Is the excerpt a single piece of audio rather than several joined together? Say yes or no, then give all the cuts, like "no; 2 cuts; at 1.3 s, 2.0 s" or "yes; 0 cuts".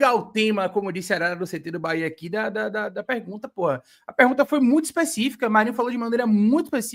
yes; 0 cuts